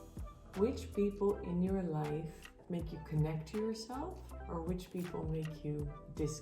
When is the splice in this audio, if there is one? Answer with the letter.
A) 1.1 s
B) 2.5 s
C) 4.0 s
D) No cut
B